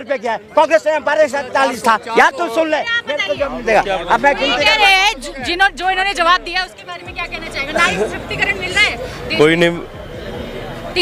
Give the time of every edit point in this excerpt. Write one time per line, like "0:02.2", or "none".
none